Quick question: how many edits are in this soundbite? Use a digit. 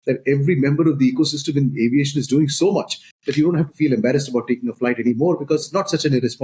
0